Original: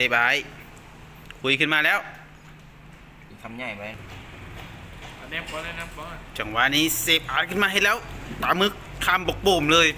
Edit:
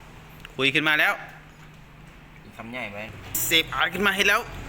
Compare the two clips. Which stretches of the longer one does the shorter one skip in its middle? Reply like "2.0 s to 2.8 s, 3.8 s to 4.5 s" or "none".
4.3 s to 7.0 s